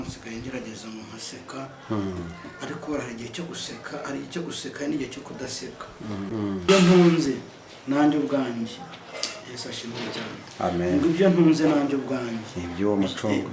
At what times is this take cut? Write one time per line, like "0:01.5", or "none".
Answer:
0:06.6